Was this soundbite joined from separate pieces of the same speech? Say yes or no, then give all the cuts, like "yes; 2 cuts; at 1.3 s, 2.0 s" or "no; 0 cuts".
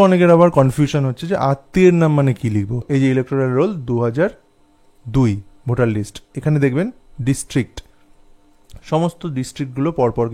yes; 1 cut; at 2.8 s